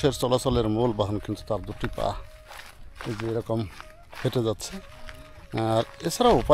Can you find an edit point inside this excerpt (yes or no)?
no